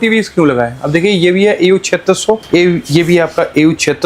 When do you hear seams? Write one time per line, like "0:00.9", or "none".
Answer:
0:02.4